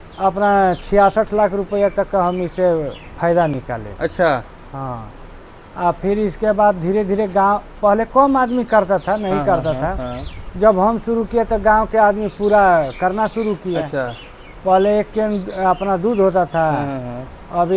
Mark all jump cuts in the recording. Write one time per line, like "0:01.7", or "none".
none